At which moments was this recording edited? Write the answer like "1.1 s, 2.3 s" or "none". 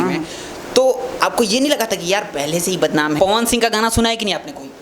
3.2 s